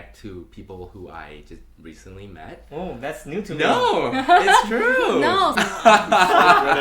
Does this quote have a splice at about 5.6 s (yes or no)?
yes